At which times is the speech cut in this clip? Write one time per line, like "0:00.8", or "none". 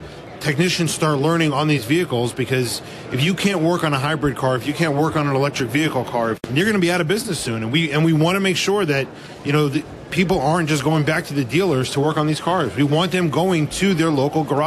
0:06.4